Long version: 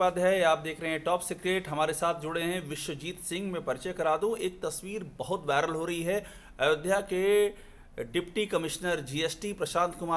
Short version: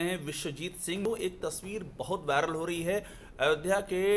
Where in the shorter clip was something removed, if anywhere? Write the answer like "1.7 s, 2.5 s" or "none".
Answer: 1.1 s